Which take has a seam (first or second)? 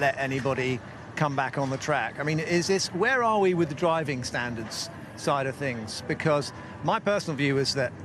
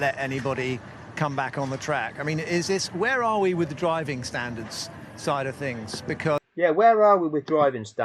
first